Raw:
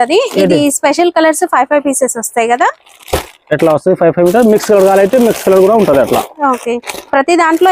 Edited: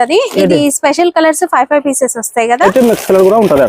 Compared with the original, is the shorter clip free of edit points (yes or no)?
no